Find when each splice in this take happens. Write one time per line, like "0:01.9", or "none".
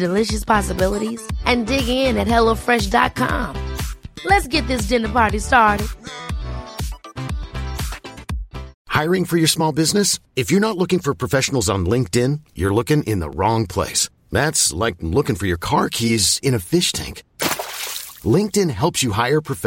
0:08.8

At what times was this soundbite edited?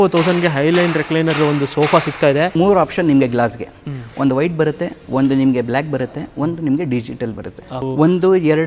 0:02.5
0:07.8

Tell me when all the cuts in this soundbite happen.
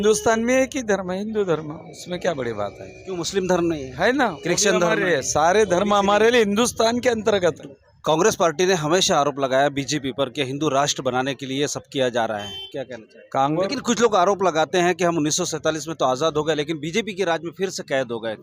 0:07.6
0:13.5

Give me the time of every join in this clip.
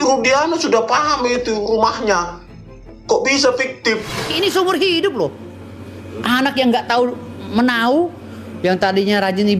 0:04.3

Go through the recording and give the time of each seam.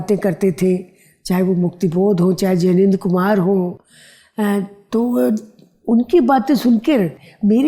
none

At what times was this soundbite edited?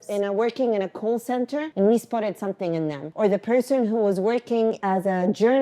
0:01.6
0:03.0
0:04.8

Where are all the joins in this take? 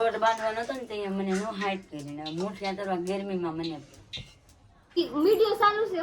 0:05.0

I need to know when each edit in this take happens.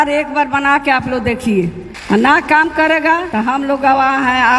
0:01.9
0:03.3

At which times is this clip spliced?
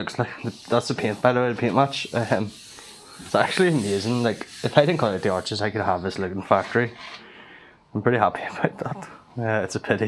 none

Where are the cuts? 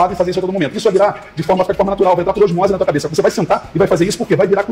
none

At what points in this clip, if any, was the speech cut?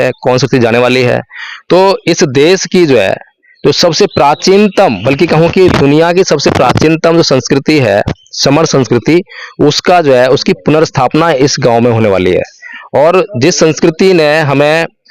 none

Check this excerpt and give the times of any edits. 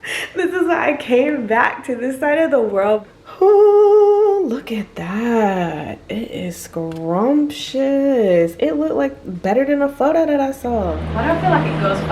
0:03.1
0:11.0

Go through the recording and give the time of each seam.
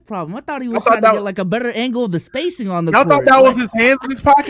none

